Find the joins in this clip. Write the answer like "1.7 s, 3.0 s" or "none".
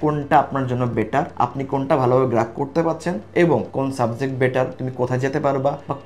3.7 s